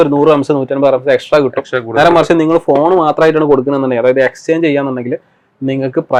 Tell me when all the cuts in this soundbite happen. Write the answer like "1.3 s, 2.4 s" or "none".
none